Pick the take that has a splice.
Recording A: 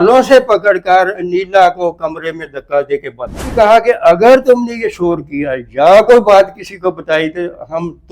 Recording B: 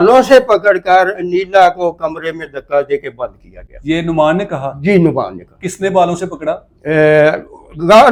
A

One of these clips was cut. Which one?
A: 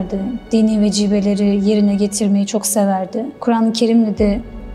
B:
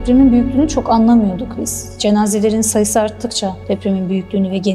A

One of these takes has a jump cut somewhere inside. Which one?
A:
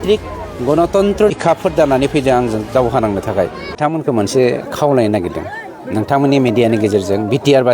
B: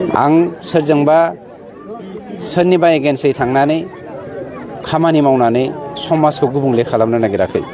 A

